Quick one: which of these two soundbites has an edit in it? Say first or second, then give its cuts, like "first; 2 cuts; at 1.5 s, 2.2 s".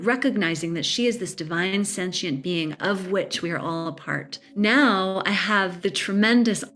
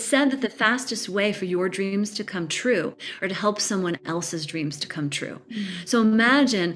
first; 2 cuts; at 4.4 s, 5.7 s